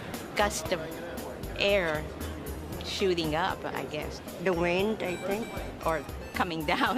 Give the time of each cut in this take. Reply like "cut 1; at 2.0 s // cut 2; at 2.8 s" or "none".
cut 1; at 1.5 s